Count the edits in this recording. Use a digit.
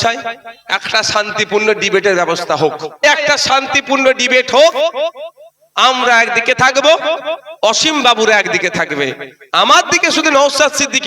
1